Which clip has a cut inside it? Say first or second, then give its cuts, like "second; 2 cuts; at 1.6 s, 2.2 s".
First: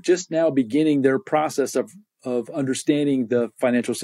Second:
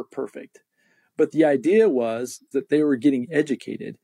second; 1 cut; at 2.4 s